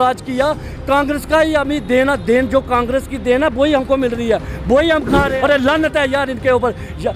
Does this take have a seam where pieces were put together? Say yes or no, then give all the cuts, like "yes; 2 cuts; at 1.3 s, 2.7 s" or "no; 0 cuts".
yes; 1 cut; at 5.3 s